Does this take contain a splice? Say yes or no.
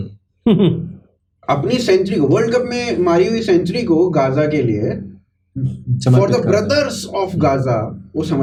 no